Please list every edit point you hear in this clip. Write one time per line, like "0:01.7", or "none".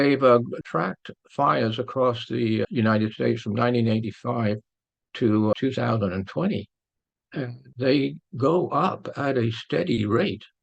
0:02.7
0:05.5
0:07.6